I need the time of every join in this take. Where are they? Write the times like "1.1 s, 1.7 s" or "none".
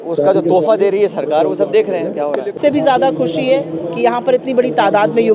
2.6 s